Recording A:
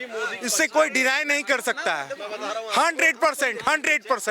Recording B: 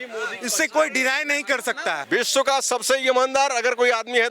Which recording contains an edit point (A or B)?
B